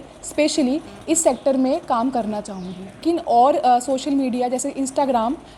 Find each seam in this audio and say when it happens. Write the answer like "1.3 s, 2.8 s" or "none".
3.0 s